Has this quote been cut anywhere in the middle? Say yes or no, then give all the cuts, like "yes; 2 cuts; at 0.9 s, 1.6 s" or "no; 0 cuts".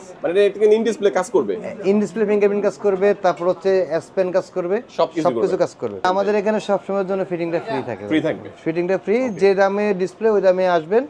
yes; 1 cut; at 6.1 s